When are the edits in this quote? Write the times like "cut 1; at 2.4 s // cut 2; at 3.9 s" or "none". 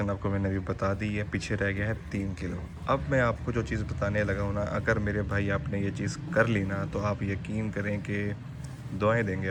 none

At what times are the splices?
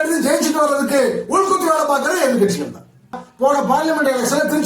cut 1; at 3.2 s

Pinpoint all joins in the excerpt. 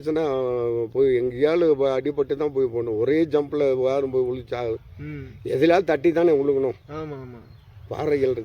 none

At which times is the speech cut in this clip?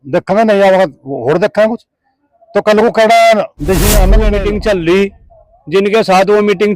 cut 1; at 4.3 s

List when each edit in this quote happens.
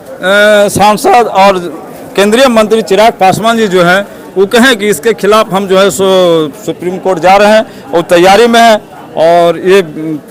none

